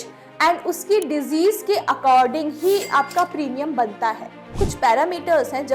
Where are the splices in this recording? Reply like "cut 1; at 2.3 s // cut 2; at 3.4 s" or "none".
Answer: cut 1; at 4.5 s